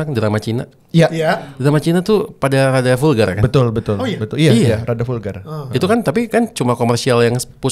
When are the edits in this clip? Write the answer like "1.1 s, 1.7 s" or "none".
none